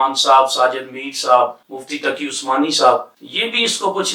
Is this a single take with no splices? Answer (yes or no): yes